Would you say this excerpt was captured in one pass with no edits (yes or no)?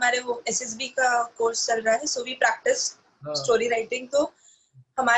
yes